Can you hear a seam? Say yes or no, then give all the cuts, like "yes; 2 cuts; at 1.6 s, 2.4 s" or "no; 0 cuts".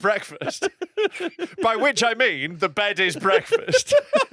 no; 0 cuts